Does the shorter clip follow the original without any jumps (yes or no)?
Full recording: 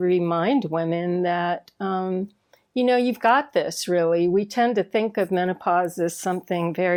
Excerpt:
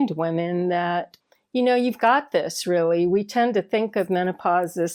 no